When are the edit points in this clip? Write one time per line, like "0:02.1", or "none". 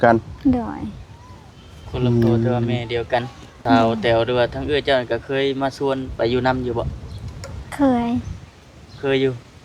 0:03.8